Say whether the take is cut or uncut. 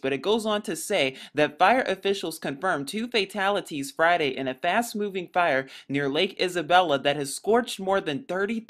uncut